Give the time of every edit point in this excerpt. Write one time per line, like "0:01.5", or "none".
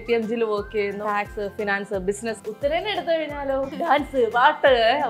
0:01.0
0:02.4
0:03.7